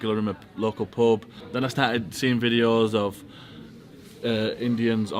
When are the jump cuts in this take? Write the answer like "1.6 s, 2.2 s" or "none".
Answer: 1.4 s